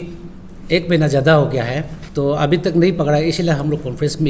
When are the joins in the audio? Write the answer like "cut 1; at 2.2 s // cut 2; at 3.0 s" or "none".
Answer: cut 1; at 1.9 s